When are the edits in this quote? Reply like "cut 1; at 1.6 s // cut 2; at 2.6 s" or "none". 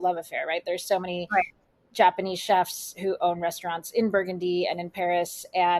none